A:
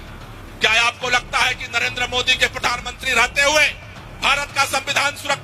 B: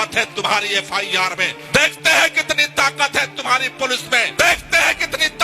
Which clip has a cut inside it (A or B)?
B